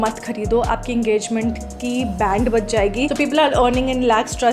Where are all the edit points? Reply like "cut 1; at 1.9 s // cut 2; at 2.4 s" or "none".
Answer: cut 1; at 3.1 s